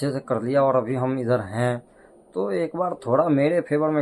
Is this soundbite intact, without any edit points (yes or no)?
yes